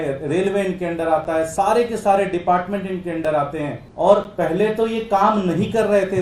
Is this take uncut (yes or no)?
no